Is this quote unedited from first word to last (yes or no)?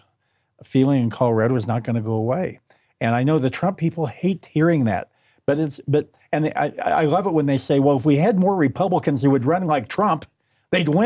yes